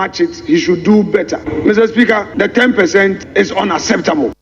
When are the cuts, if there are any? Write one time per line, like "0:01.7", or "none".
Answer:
0:01.4
0:02.3